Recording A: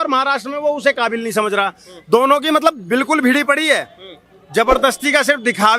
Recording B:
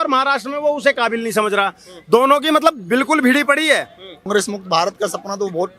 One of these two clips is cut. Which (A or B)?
B